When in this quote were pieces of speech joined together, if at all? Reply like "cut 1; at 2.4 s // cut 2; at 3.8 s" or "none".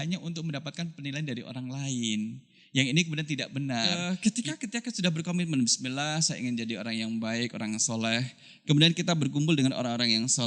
cut 1; at 4.0 s